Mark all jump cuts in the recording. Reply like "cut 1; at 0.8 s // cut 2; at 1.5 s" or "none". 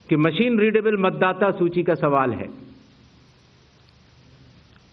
cut 1; at 1.0 s